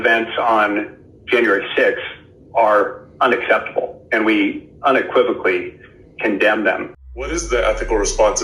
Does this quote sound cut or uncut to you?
cut